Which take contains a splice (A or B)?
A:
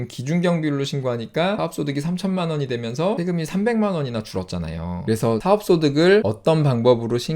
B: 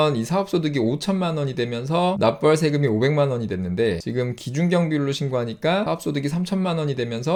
A